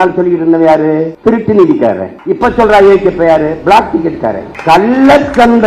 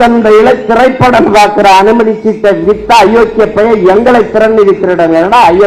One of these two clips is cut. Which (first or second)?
first